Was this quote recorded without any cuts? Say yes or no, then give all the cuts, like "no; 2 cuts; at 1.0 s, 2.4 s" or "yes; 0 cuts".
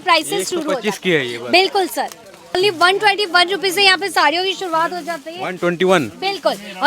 no; 1 cut; at 2.6 s